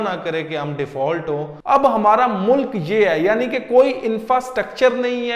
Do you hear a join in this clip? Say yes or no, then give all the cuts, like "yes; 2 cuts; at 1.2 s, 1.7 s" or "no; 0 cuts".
yes; 1 cut; at 1.5 s